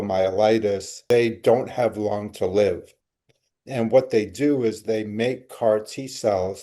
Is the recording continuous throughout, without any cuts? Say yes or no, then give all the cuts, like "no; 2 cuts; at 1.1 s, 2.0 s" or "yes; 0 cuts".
no; 1 cut; at 1.0 s